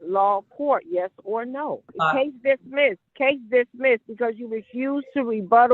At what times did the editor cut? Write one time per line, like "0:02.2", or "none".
0:01.9
0:03.1